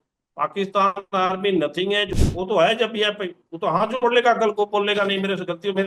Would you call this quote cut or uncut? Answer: cut